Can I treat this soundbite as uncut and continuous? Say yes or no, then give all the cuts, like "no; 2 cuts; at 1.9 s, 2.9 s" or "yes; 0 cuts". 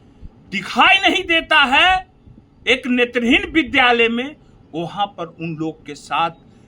yes; 0 cuts